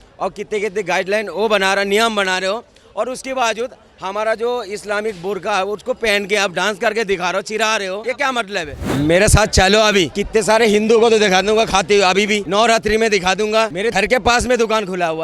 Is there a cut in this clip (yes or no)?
yes